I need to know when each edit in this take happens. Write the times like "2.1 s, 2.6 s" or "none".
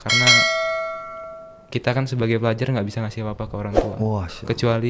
none